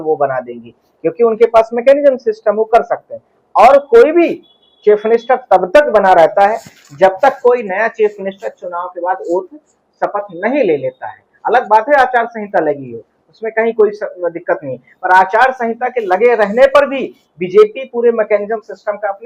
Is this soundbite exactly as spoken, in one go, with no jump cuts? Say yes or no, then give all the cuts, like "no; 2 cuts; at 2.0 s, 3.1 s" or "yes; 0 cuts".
yes; 0 cuts